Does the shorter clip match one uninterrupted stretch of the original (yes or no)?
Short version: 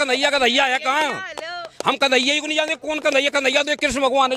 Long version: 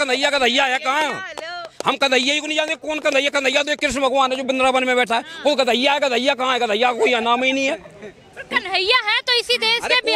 yes